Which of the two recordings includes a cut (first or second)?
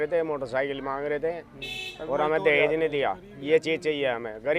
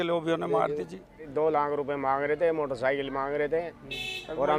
second